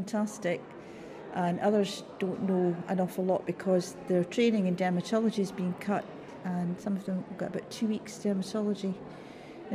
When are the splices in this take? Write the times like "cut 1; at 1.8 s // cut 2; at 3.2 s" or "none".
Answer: none